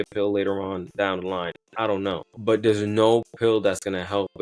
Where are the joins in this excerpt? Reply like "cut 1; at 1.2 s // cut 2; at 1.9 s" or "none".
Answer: cut 1; at 2.3 s